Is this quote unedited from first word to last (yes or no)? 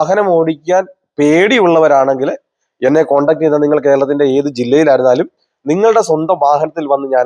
yes